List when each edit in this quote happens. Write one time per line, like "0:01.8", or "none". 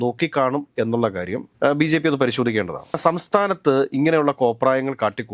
0:03.0